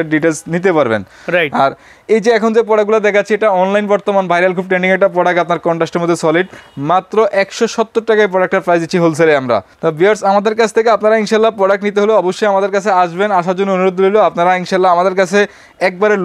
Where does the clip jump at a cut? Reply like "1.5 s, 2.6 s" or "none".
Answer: none